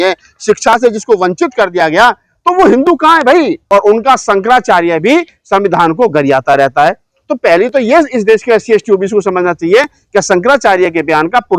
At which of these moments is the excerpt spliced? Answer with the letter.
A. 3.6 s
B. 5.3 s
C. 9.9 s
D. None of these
A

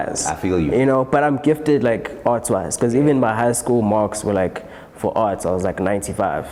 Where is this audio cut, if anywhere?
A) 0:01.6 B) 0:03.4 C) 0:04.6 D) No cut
D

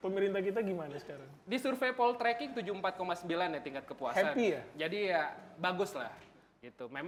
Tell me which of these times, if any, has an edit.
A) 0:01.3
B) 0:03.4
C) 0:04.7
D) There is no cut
D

